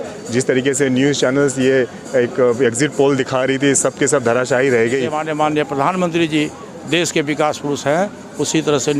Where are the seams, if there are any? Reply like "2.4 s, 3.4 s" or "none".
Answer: 5.2 s